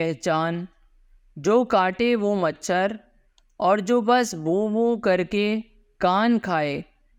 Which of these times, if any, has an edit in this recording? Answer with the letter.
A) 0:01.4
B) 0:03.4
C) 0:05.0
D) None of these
D